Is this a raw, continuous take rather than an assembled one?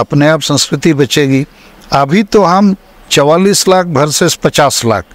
yes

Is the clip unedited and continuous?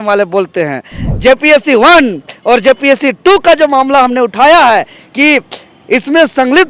no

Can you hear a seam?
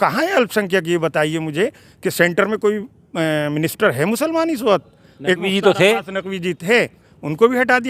no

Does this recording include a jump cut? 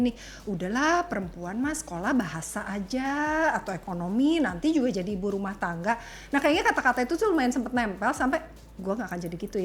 no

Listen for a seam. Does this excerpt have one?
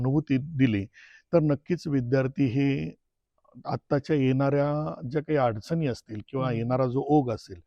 no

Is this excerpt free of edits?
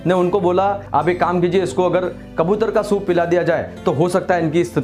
yes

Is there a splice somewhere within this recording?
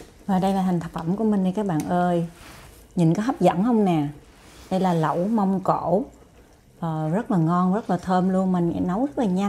no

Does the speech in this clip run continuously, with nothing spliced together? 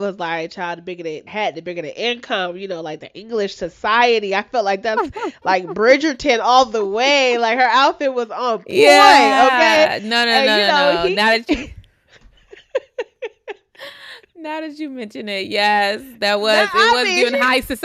yes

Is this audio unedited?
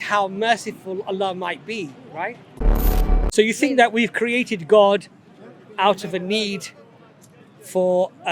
no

